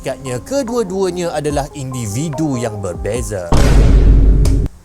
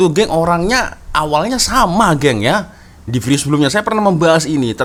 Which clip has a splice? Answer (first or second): first